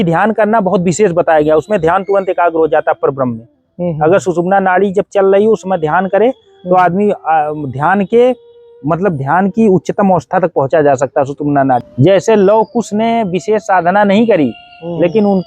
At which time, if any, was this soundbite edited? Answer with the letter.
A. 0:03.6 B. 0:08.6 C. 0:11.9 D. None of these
C